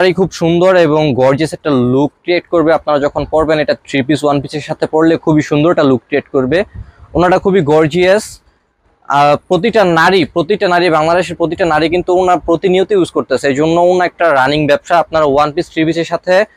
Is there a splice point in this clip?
no; 0 cuts

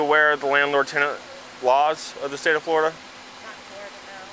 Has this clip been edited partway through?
no; 0 cuts

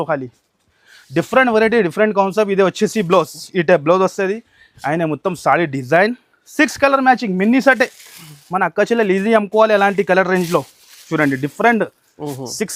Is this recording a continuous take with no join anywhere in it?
yes; 0 cuts

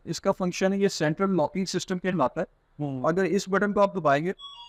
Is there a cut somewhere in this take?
no; 0 cuts

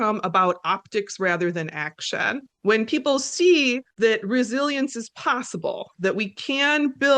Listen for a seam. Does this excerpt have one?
yes; 2 cuts; at 2.5 s, 3.9 s

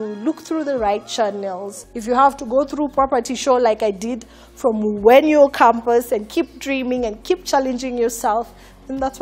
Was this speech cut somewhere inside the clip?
no; 0 cuts

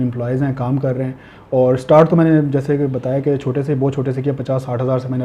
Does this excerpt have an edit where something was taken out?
no; 0 cuts

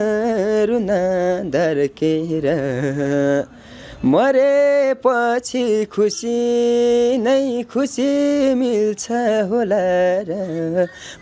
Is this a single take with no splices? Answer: yes; 0 cuts

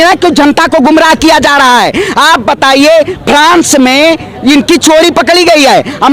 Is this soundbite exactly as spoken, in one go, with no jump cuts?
yes; 0 cuts

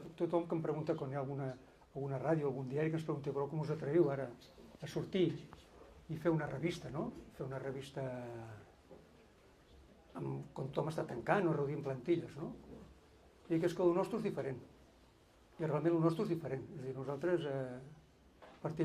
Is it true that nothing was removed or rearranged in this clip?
no; 1 cut; at 16.0 s

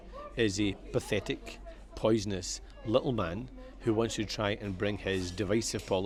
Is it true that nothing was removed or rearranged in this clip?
yes; 0 cuts

